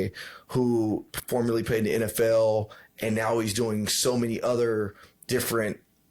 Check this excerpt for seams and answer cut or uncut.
uncut